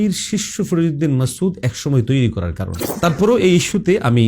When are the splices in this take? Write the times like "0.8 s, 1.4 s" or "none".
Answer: 2.9 s